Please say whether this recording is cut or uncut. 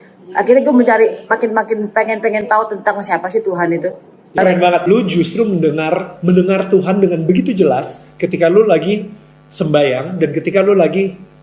cut